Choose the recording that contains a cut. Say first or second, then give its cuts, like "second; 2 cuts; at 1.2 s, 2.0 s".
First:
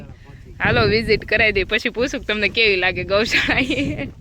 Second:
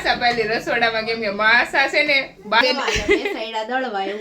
second; 1 cut; at 2.6 s